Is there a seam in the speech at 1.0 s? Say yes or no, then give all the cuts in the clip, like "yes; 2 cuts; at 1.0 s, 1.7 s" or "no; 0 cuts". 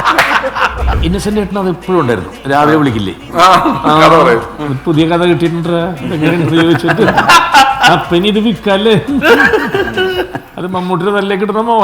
yes; 1 cut; at 1.0 s